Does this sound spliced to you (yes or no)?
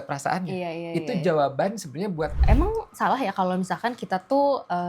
yes